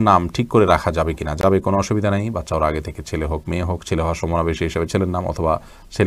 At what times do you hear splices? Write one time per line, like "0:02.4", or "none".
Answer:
none